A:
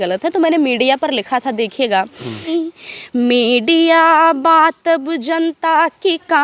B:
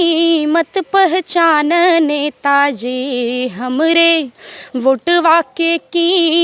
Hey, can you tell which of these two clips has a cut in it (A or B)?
A